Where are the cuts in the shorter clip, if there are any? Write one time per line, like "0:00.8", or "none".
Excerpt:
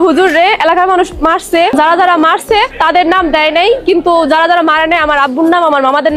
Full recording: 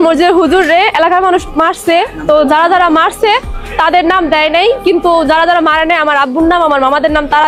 0:01.7
0:02.7